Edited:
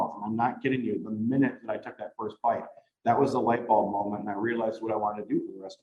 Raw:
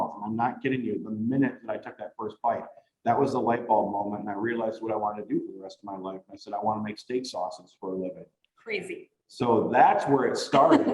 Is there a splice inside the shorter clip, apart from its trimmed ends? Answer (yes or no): no